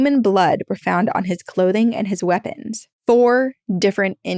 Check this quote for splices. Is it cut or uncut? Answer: uncut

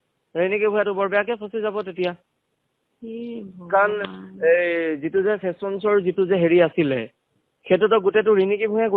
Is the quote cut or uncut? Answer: uncut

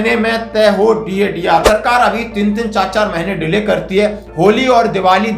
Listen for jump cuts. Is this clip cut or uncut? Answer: cut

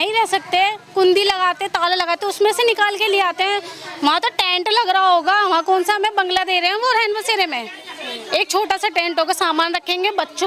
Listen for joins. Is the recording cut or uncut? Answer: uncut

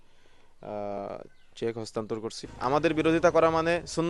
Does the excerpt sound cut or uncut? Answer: cut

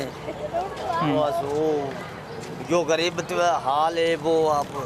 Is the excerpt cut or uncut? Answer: uncut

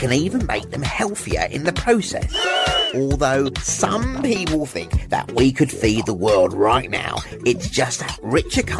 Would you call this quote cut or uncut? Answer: uncut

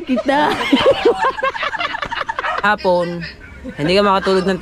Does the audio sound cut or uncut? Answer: cut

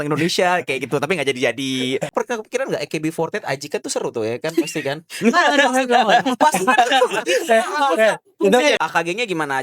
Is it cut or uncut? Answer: cut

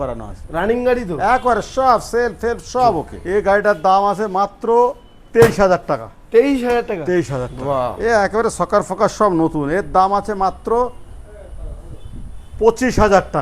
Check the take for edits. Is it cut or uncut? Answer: cut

